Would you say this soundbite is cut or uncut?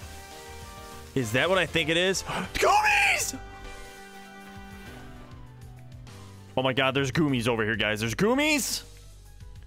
uncut